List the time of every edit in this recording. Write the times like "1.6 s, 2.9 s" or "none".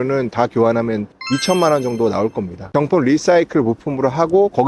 1.1 s, 2.6 s